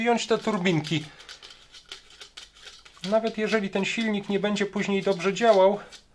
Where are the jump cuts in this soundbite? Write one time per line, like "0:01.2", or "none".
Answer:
none